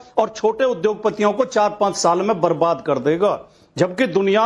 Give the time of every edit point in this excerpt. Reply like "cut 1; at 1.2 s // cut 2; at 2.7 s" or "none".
cut 1; at 3.5 s